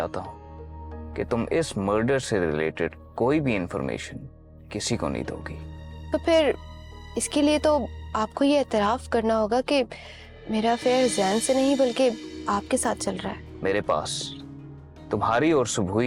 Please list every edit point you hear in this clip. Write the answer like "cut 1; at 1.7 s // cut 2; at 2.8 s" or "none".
cut 1; at 13.5 s